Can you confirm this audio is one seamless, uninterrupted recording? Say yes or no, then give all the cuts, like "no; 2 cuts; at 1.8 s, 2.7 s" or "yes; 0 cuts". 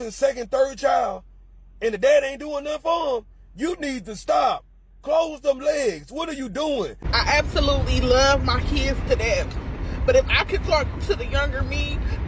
no; 1 cut; at 7.0 s